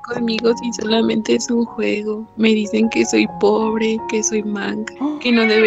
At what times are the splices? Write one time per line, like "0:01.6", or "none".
none